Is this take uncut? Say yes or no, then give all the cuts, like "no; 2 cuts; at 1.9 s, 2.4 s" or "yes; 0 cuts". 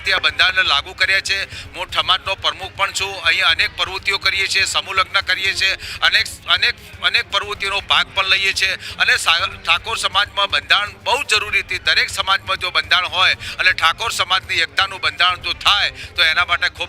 yes; 0 cuts